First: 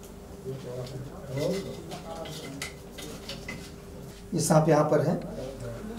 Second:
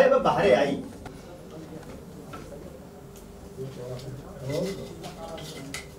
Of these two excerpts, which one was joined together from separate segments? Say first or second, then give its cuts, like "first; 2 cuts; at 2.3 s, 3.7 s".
first; 1 cut; at 4.1 s